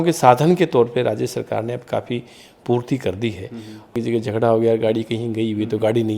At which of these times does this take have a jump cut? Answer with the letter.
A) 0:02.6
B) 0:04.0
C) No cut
B